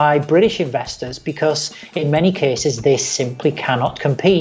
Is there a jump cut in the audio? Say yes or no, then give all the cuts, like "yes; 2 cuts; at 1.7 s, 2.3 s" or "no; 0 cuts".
no; 0 cuts